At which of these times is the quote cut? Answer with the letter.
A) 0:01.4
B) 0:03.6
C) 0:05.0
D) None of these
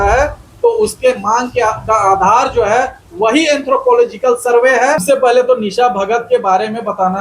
C